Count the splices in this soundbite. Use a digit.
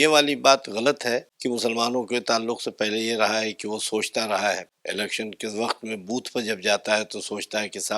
2